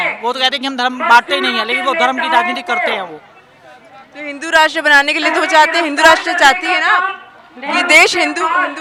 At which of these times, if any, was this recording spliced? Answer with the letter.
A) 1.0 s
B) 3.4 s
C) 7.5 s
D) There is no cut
D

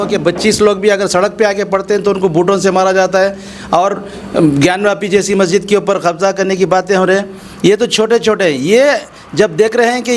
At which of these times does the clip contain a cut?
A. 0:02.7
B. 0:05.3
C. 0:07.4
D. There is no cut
D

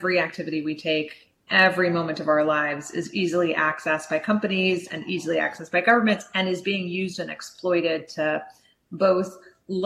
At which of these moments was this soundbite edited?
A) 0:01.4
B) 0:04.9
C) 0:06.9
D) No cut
A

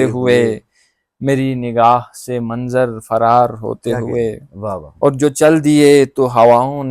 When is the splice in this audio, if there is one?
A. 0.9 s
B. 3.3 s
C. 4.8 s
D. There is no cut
C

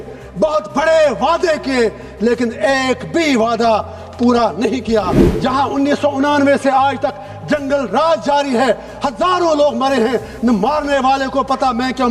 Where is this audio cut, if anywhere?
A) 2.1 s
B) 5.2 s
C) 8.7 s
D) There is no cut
B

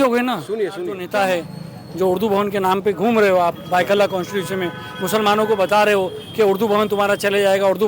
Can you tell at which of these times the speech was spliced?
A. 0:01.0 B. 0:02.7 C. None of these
A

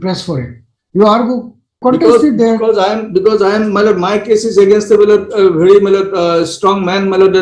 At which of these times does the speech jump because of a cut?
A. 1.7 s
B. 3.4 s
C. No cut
A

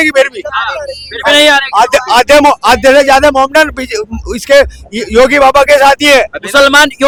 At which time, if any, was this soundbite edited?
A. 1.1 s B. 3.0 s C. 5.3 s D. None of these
D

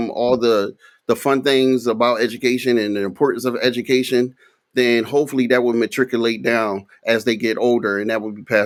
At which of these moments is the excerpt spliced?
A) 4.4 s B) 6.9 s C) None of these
C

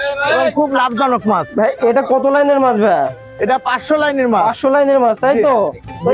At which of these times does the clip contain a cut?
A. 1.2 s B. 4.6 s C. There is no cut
C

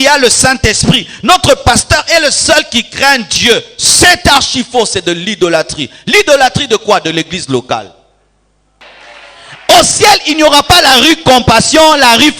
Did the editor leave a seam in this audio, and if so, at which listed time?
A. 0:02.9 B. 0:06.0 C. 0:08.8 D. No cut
C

